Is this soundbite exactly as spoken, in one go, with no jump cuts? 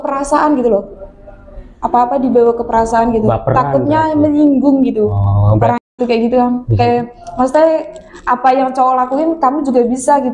no; 1 cut; at 5.8 s

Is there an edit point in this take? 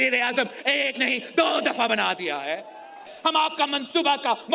yes; 1 cut; at 3.1 s

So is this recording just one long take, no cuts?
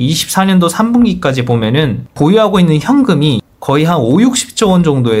no; 1 cut; at 2.1 s

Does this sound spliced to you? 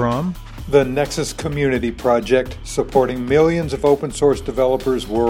no; 0 cuts

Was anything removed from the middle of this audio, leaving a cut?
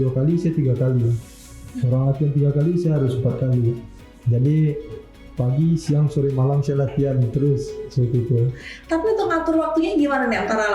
no; 0 cuts

